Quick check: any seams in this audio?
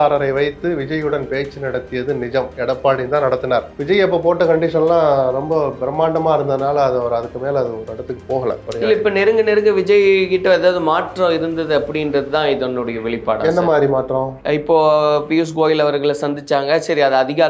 yes; 1 cut; at 3.7 s

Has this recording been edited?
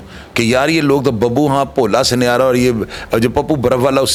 no; 0 cuts

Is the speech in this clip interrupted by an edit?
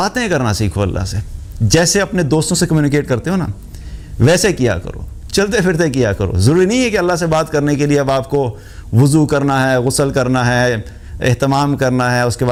no; 0 cuts

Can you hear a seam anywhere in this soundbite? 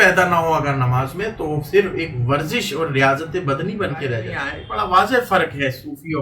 yes; 1 cut; at 4.8 s

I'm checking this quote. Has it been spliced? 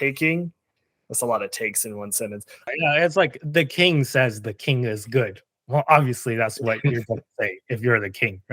yes; 1 cut; at 2.7 s

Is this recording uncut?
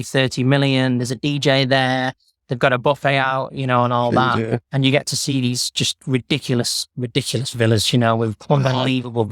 yes; 0 cuts

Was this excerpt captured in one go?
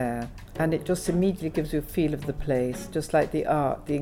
yes; 0 cuts

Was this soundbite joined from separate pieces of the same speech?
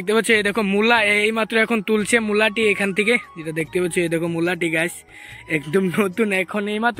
no; 0 cuts

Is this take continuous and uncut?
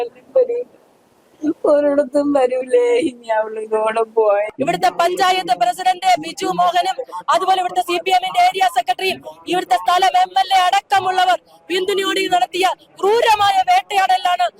no; 1 cut; at 4.5 s

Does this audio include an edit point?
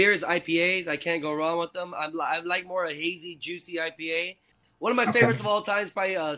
yes; 1 cut; at 4.6 s

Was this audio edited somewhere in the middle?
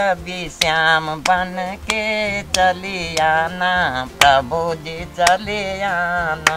no; 0 cuts

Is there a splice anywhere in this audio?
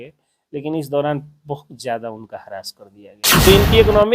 yes; 1 cut; at 3.2 s

